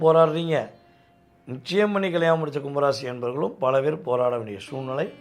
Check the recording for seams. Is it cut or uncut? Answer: uncut